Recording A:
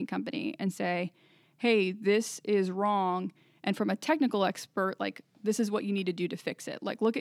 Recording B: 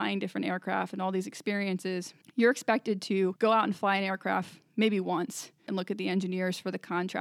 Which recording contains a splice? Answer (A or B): B